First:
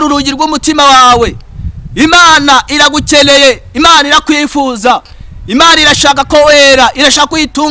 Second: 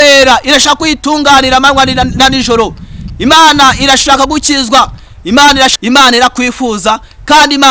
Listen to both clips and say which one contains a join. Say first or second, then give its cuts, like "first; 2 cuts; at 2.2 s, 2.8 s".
second; 1 cut; at 5.7 s